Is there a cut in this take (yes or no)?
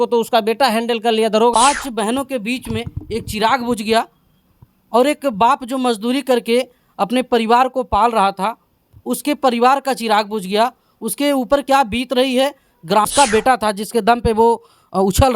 yes